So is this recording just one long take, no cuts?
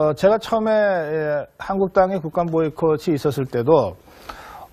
yes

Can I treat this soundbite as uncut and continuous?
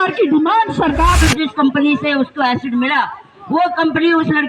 no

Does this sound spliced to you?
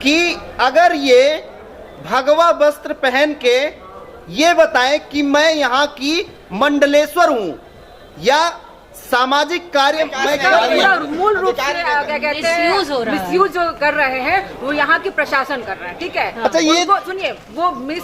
yes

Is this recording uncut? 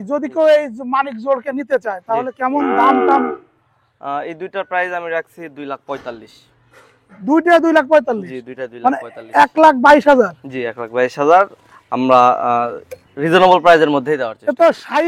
yes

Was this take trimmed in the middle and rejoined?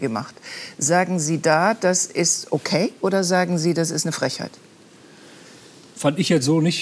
no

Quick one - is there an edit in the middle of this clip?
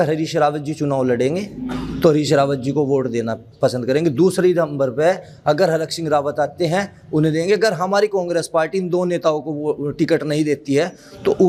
no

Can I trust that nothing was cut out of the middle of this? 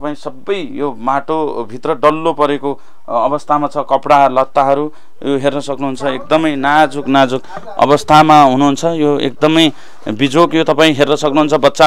yes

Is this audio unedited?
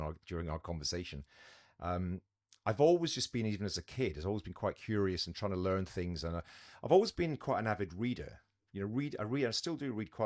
yes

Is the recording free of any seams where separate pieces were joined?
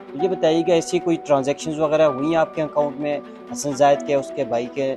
yes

